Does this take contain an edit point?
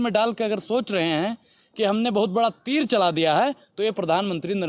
no; 0 cuts

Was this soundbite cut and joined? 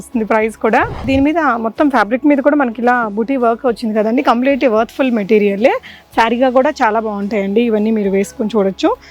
yes; 1 cut; at 1.0 s

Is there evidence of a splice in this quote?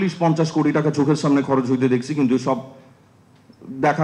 no; 0 cuts

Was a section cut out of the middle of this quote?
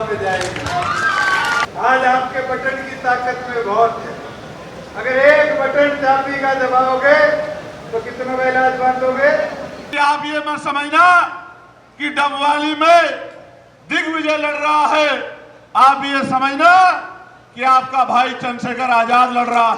yes; 2 cuts; at 1.6 s, 9.8 s

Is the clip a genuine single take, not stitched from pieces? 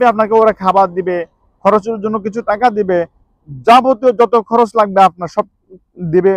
yes; 0 cuts

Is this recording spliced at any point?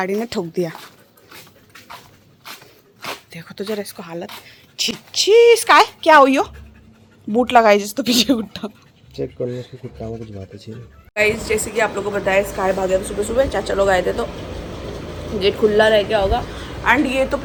no; 0 cuts

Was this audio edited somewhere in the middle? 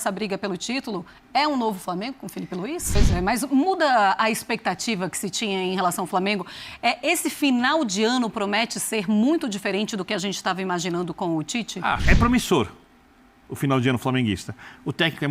yes; 2 cuts; at 3.0 s, 12.0 s

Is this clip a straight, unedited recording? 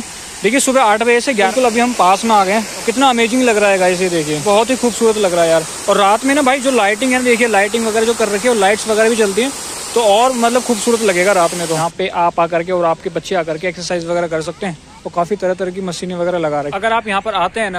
no; 5 cuts; at 1.5 s, 2.8 s, 4.4 s, 11.8 s, 16.7 s

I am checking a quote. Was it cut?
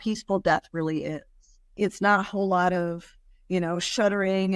no; 0 cuts

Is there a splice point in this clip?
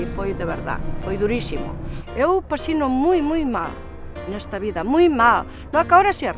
yes; 1 cut; at 1.8 s

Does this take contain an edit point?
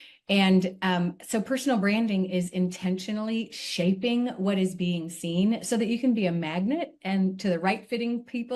no; 0 cuts

